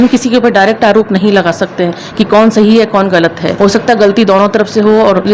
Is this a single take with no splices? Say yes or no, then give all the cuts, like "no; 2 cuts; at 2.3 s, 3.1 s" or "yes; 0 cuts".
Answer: yes; 0 cuts